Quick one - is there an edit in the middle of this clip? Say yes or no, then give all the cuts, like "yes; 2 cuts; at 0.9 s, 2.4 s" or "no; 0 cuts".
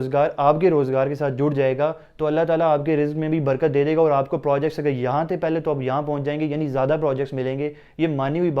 no; 0 cuts